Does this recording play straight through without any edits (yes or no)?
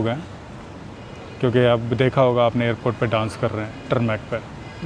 yes